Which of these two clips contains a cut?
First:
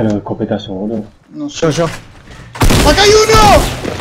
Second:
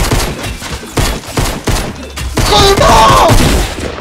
second; 1 cut; at 2.8 s

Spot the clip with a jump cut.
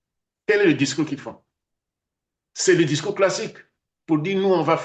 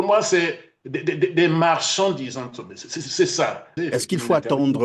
second; 1 cut; at 3.8 s

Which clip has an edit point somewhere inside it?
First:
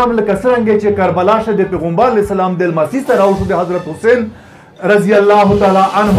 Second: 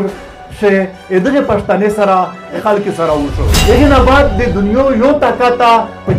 second; 2 cuts; at 2.6 s, 3.5 s

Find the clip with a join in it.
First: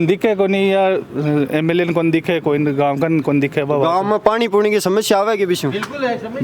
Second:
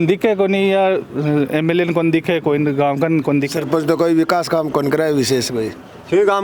second; 1 cut; at 3.5 s

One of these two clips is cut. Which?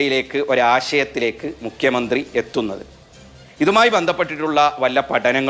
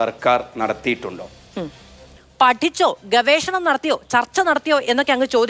second; 1 cut; at 2.2 s

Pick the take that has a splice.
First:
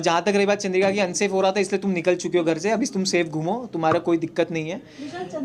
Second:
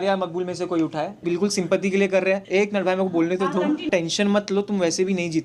second; 3 cuts; at 1.2 s, 2.4 s, 4.1 s

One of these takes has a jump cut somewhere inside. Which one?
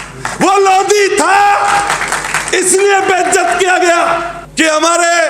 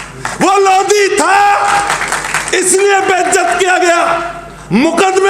first; 1 cut; at 4.4 s

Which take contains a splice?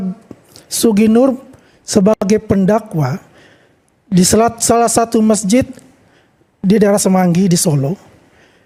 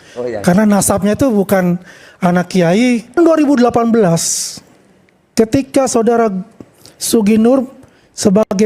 second; 1 cut; at 3.2 s

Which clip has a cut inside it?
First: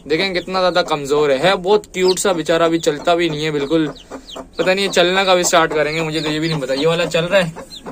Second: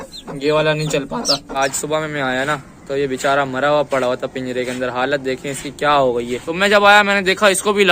second; 2 cuts; at 1.6 s, 6.4 s

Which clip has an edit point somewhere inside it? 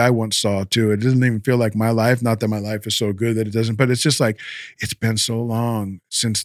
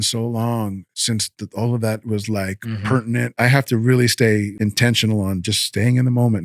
second; 2 cuts; at 3.3 s, 4.5 s

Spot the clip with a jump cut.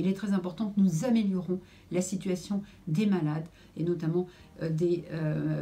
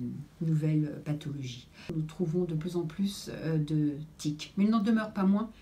second; 1 cut; at 1.8 s

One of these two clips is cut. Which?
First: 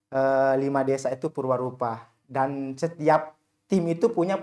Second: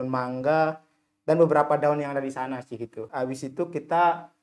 second; 1 cut; at 3.0 s

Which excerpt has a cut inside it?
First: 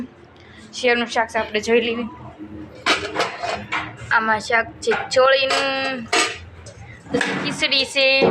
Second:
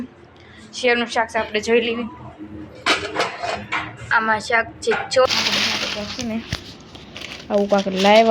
second; 1 cut; at 5.3 s

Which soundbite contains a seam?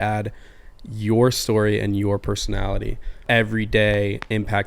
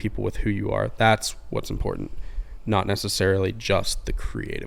first; 1 cut; at 3.2 s

